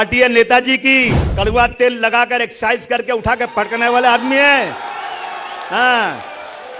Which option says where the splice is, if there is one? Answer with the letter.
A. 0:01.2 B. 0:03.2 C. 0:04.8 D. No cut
A